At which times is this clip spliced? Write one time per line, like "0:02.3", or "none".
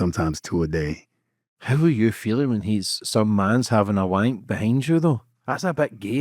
0:01.6